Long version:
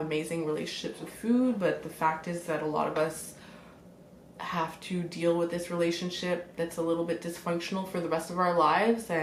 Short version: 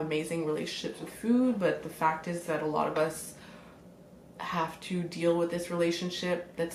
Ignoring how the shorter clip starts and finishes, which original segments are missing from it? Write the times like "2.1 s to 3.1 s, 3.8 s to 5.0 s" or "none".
none